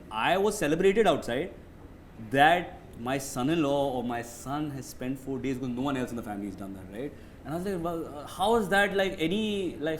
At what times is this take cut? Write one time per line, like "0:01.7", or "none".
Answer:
none